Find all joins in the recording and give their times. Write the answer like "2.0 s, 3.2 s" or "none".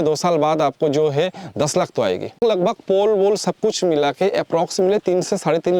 2.4 s